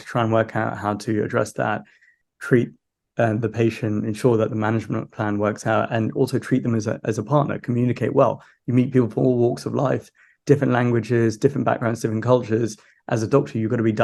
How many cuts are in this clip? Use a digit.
0